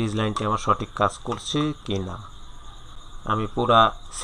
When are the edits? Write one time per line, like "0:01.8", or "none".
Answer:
0:03.0